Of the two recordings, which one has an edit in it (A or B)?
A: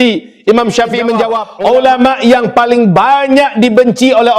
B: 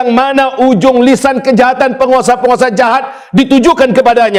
A